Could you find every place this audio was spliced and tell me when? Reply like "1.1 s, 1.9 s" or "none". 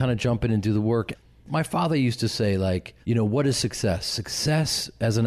1.2 s, 2.9 s